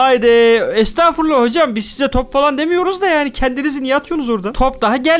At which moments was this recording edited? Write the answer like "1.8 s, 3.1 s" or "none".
none